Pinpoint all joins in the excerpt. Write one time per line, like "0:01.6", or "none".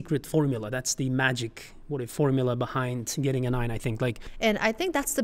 0:04.3